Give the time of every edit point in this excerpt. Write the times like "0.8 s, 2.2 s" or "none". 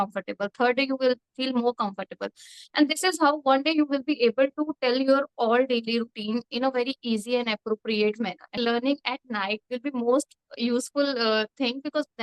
8.5 s